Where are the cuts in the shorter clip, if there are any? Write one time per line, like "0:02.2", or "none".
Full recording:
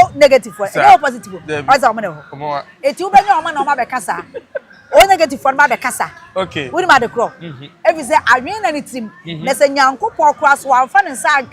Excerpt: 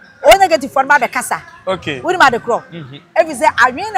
none